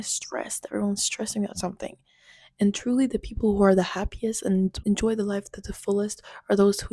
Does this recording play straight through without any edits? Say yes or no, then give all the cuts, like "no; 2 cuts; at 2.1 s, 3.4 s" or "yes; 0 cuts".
no; 1 cut; at 4.8 s